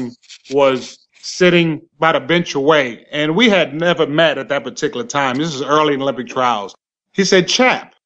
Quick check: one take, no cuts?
yes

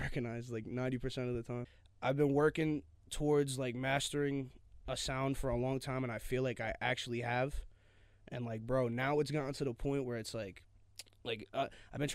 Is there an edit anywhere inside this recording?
yes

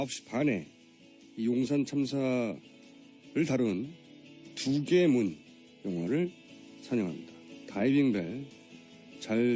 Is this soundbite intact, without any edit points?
yes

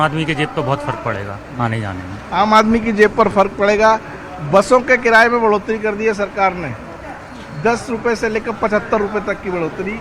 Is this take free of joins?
yes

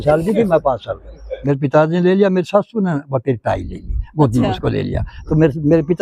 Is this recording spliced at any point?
yes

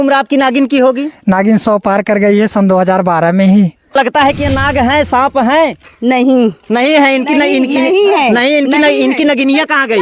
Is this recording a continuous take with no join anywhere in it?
no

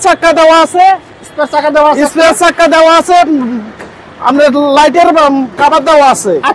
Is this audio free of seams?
yes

